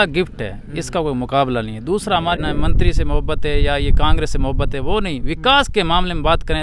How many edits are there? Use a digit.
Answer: 1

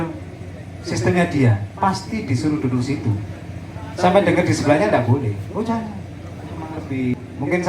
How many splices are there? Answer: 1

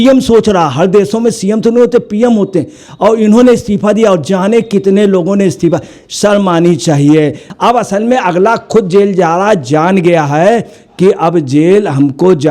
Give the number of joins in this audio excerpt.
1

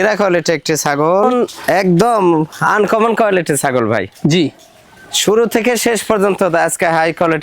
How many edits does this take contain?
1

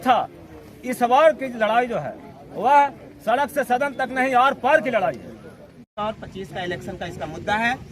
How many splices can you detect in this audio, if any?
1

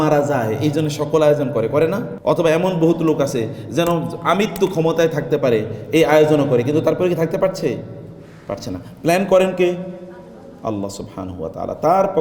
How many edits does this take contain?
1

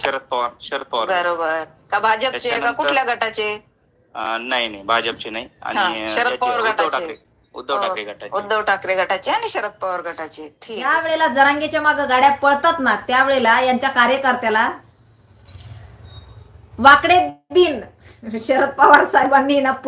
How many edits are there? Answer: 1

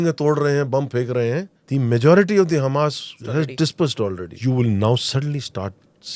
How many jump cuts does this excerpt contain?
3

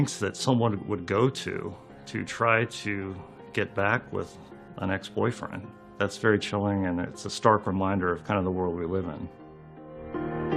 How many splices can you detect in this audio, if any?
0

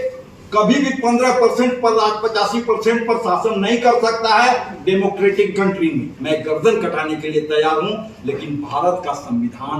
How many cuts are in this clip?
1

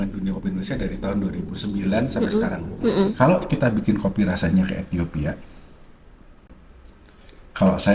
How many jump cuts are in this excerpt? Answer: 1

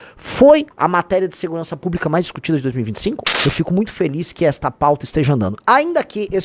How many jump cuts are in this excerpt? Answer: 1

